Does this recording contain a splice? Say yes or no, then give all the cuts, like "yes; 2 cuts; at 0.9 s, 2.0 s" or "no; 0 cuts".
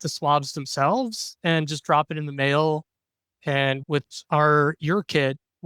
no; 0 cuts